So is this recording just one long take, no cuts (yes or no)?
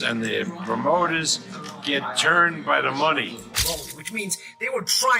no